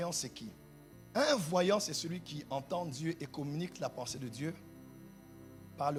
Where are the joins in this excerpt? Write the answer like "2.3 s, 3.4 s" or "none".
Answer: none